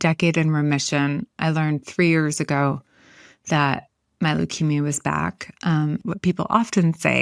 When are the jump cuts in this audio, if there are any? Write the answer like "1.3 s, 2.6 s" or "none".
6.0 s